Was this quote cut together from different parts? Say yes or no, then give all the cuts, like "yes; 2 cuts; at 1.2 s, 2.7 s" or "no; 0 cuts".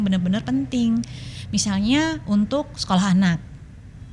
no; 0 cuts